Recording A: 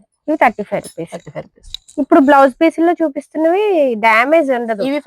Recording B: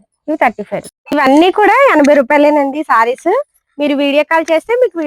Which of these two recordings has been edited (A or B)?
B